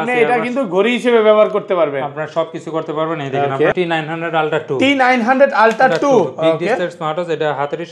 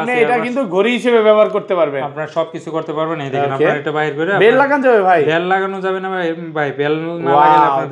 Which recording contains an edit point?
first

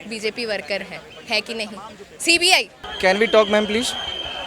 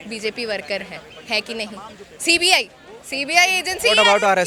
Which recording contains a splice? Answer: first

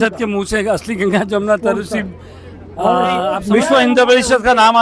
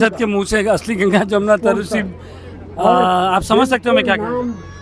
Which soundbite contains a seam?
first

